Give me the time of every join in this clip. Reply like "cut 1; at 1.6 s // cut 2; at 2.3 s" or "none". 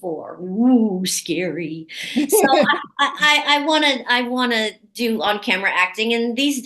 none